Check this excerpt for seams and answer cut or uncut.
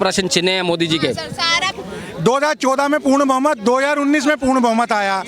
cut